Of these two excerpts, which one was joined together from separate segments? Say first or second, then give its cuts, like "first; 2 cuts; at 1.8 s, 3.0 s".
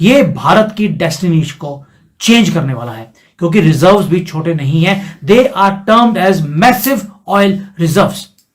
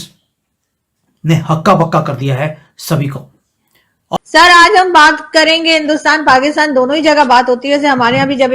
second; 1 cut; at 4.2 s